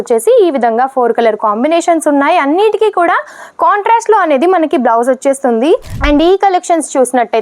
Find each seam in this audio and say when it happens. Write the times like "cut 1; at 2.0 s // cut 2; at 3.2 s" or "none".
cut 1; at 6.0 s